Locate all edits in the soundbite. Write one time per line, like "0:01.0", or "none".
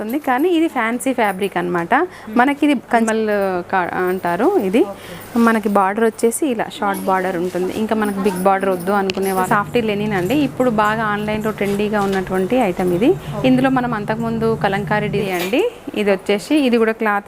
0:03.1
0:09.5
0:15.2